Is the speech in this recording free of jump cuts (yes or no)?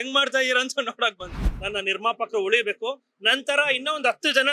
no